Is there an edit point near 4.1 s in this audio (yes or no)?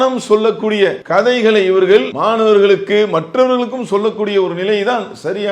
no